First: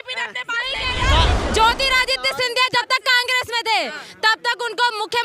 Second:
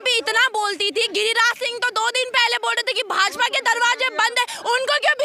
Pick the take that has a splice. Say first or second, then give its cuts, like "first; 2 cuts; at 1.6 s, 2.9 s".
first; 1 cut; at 1.4 s